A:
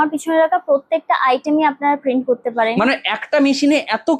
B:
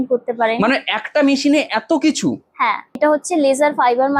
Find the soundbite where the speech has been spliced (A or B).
B